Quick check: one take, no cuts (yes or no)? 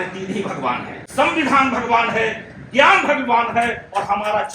no